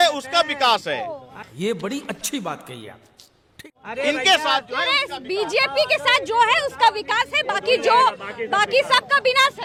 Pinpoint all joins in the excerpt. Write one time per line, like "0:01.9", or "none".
none